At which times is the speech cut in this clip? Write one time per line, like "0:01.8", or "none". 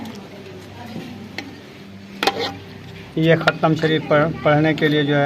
0:02.0